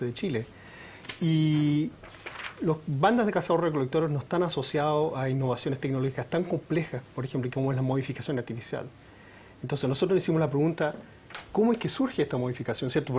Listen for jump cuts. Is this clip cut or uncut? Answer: uncut